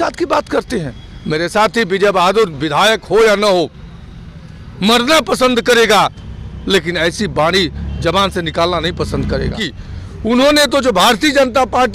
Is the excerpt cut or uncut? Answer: cut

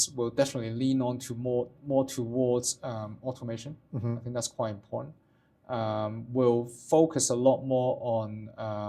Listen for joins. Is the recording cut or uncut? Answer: uncut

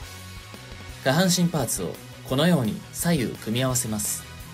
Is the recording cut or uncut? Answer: cut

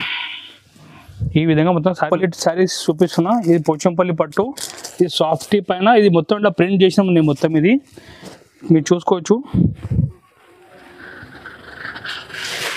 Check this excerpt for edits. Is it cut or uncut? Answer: cut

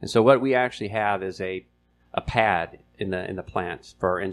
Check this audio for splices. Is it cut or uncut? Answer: uncut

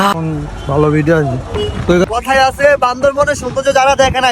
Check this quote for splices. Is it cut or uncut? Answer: cut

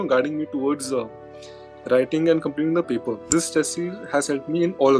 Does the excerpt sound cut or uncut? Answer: cut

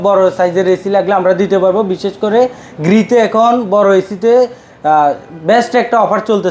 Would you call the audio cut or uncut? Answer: uncut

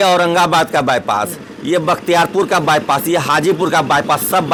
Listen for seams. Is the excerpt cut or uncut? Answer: uncut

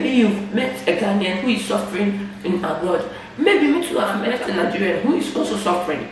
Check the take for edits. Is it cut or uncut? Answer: cut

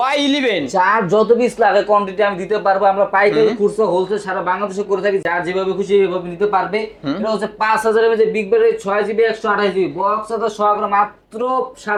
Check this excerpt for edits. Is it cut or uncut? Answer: uncut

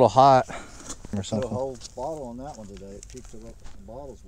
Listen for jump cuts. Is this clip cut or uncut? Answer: cut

